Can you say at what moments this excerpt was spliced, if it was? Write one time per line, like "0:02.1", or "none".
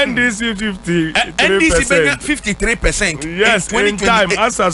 none